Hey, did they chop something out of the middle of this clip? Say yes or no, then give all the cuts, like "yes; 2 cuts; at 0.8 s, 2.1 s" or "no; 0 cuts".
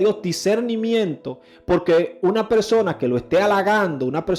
no; 0 cuts